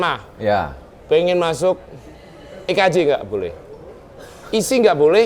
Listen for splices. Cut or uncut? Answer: uncut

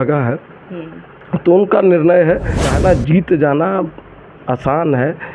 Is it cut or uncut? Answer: cut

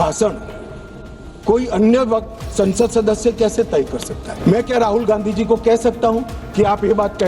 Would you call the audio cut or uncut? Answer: cut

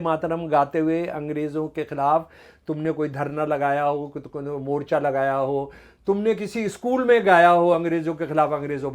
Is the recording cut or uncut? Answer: uncut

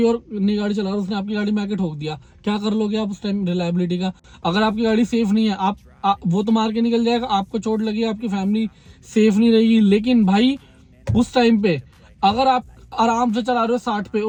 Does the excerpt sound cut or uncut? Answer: uncut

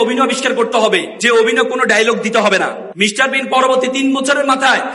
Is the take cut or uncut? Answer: cut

